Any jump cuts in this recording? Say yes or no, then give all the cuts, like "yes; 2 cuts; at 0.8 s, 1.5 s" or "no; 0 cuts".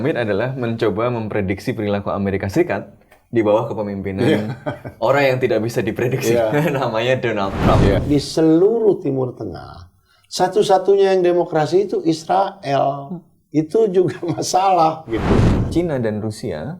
yes; 2 cuts; at 8.0 s, 15.6 s